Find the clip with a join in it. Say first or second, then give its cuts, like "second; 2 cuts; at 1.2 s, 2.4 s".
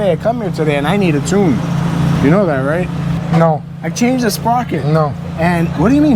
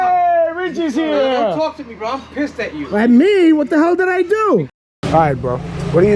second; 1 cut; at 4.8 s